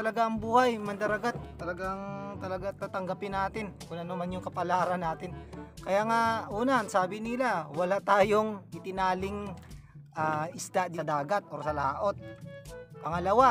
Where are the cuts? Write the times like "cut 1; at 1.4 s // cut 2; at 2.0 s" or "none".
cut 1; at 11.0 s